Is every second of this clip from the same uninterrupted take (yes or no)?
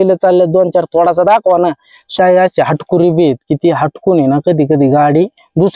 no